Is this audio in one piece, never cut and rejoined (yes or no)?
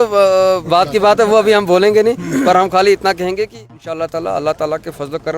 no